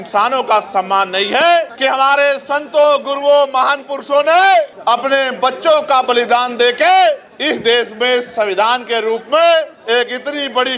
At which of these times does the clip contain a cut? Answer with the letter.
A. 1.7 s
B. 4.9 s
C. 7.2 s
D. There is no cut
A